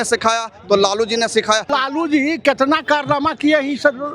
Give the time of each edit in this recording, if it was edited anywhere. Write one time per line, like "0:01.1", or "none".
0:01.7